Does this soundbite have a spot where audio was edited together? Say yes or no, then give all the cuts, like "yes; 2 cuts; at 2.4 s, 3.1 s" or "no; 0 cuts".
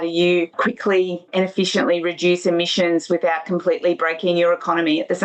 no; 0 cuts